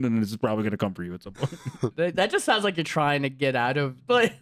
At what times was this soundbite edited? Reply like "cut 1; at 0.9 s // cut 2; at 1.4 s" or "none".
cut 1; at 1.9 s